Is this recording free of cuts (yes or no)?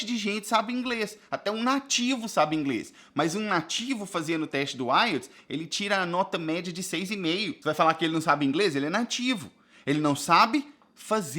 no